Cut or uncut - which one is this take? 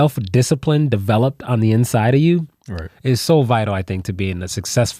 uncut